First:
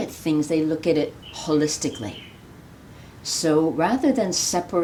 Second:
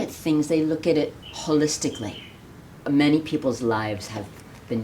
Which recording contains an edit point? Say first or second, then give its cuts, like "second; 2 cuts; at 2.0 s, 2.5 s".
second; 1 cut; at 2.7 s